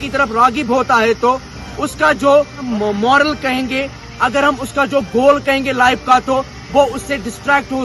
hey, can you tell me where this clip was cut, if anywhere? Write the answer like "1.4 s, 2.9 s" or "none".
2.7 s